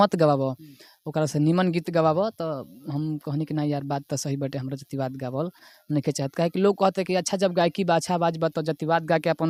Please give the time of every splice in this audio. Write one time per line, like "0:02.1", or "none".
none